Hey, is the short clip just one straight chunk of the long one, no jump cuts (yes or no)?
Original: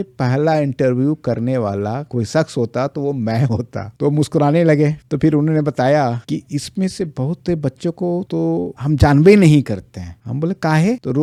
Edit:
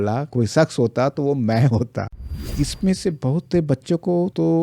no